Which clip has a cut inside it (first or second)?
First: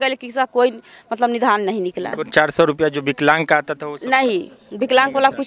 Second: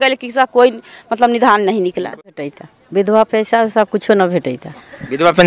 second